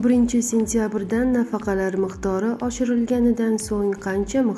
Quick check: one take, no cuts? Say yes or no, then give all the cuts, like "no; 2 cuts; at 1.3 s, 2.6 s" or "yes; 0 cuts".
yes; 0 cuts